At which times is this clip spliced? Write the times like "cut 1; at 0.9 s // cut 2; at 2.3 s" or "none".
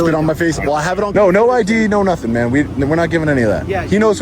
cut 1; at 1.1 s